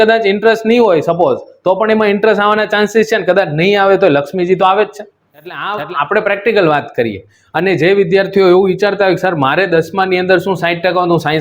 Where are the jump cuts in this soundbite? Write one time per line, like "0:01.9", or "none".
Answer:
0:05.6